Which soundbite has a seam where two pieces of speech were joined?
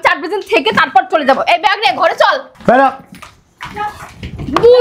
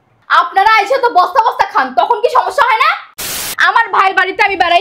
second; 1 cut; at 3.2 s

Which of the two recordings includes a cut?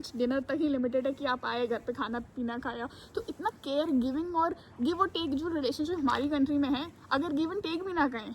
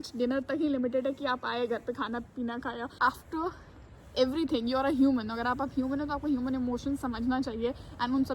second; 1 cut; at 2.9 s

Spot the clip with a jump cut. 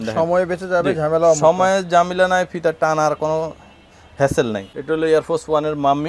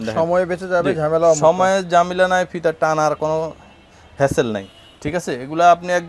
first; 1 cut; at 4.7 s

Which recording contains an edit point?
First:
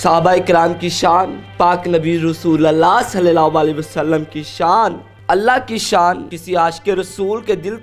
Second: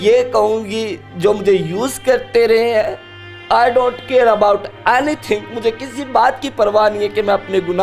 first; 2 cuts; at 5.1 s, 6.4 s

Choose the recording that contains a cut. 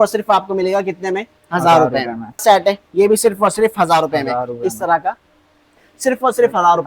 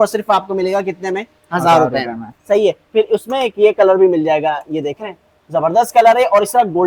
first; 2 cuts; at 2.4 s, 5.9 s

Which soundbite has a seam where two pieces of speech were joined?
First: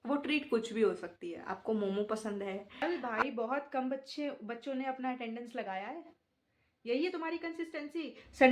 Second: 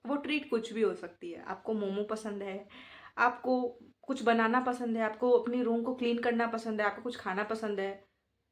first; 1 cut; at 2.8 s

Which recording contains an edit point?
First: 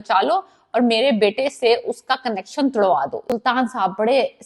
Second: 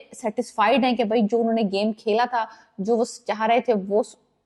first; 1 cut; at 3.3 s

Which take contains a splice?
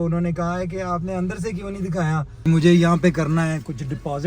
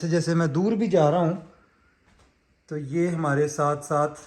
first; 1 cut; at 2.3 s

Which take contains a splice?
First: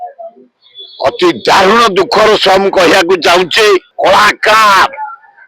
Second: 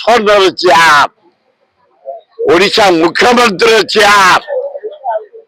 first; 1 cut; at 3.9 s

